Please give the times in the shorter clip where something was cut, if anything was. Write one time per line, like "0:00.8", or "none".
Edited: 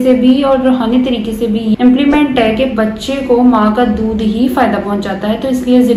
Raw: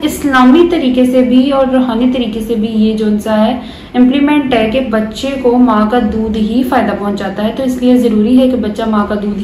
0:01.7